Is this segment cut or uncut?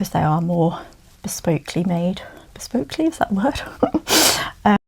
uncut